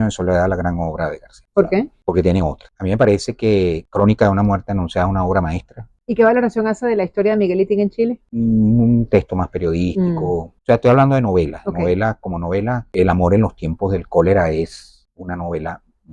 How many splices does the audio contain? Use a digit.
0